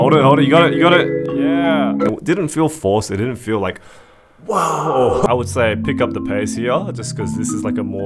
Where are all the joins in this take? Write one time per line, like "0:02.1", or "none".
0:02.1
0:05.3